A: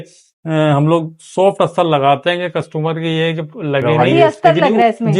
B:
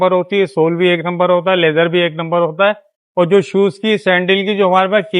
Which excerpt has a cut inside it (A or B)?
A